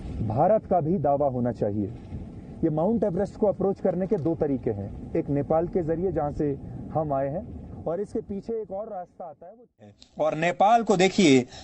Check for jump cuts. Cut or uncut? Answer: cut